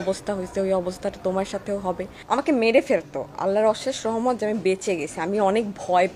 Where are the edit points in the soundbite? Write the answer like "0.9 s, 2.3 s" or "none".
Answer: 2.1 s